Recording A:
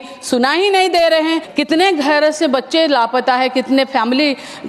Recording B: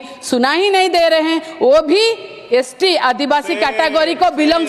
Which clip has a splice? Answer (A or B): A